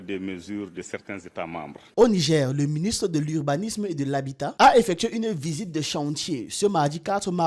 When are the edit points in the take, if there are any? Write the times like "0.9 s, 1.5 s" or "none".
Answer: 1.9 s